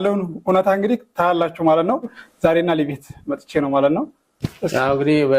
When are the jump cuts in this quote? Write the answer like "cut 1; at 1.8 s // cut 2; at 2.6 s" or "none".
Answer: cut 1; at 2.2 s